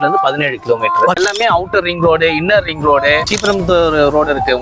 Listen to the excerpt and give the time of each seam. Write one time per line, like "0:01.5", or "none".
0:01.2
0:03.3